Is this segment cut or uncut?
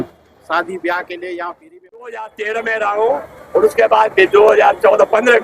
cut